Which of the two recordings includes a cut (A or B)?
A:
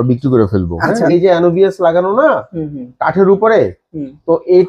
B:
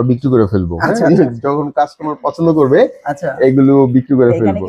A